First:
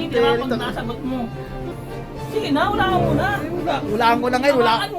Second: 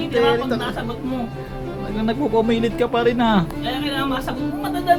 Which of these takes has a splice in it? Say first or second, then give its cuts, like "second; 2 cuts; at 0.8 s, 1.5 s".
first; 1 cut; at 1.8 s